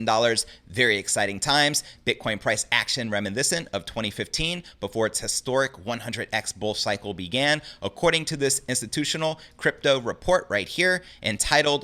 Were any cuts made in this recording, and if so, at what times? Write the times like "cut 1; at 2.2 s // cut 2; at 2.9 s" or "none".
none